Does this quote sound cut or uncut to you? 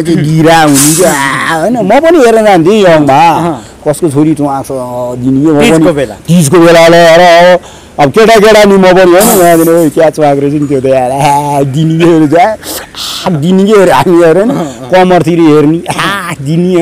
uncut